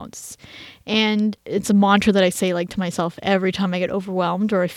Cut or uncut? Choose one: cut